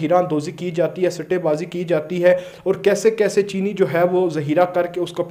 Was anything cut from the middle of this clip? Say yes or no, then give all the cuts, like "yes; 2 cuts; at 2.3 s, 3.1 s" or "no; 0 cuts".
no; 0 cuts